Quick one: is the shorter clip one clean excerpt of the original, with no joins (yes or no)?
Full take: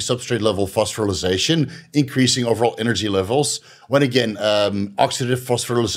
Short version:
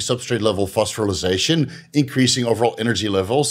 yes